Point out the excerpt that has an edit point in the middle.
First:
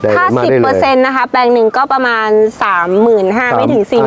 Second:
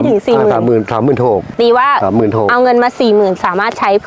second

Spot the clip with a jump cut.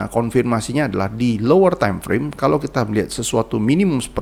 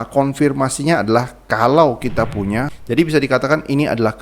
second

